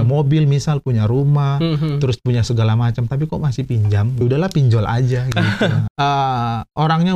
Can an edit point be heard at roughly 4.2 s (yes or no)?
yes